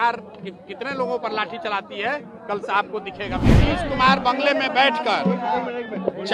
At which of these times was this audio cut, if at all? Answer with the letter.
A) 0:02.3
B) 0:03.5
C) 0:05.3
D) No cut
B